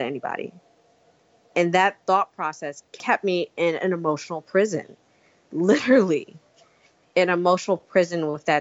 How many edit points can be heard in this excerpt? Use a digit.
1